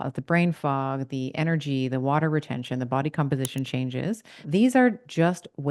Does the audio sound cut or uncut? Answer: cut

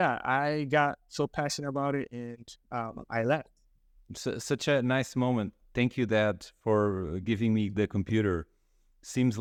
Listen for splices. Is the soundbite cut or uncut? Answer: uncut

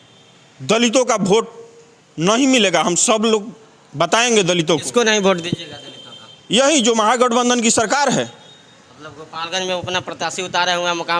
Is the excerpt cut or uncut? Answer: uncut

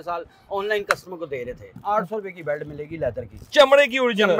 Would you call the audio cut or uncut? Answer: cut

